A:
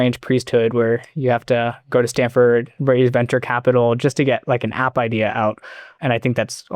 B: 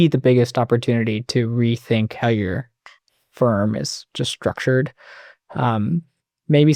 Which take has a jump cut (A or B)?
A